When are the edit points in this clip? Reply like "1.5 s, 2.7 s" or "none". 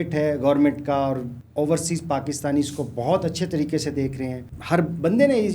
1.4 s, 4.5 s